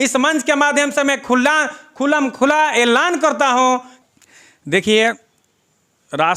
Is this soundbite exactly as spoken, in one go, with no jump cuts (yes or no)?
no